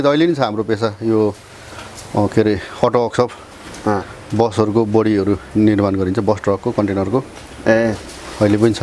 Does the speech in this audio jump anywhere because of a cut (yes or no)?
no